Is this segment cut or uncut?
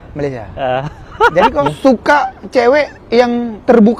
cut